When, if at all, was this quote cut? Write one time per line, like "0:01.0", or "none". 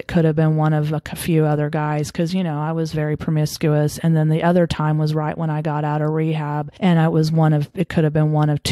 0:06.7